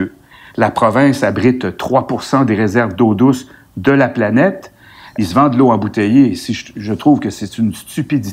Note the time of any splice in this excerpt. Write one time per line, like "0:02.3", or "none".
0:05.0